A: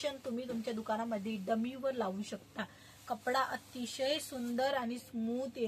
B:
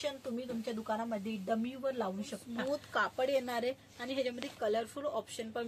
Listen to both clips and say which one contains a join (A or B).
B